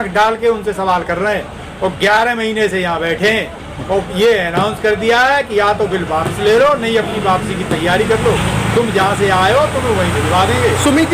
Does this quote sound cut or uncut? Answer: uncut